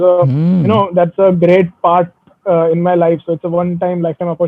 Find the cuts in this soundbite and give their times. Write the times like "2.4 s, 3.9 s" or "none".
none